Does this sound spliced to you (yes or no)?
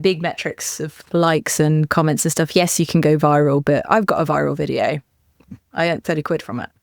yes